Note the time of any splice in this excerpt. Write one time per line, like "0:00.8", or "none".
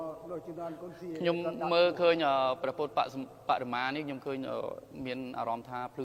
none

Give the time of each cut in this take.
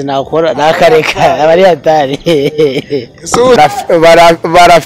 0:03.6

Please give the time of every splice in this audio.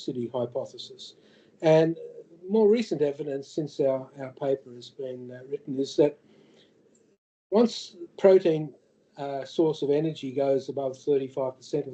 none

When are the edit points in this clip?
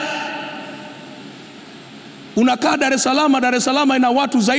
none

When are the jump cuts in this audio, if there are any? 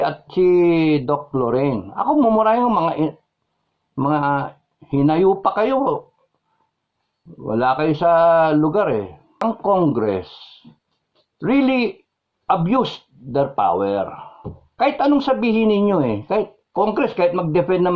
0:09.3

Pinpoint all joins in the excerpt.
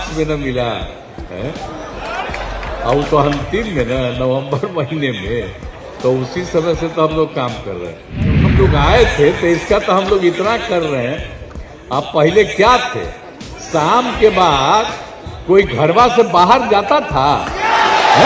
0:08.5

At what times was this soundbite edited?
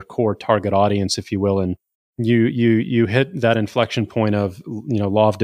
0:01.7

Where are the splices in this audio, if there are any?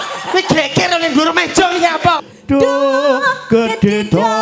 0:02.3

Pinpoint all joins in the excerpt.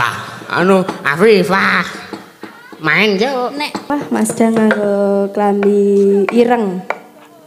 0:03.8

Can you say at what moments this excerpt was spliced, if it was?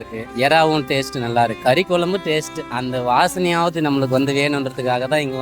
none

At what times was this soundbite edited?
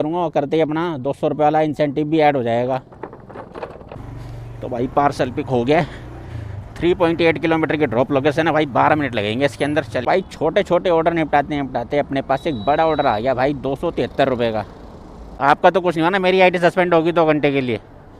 0:04.0
0:10.0
0:15.4

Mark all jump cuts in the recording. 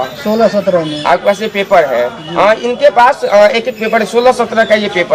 none

